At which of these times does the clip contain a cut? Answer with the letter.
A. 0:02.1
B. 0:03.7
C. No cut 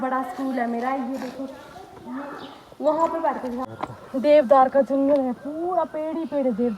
B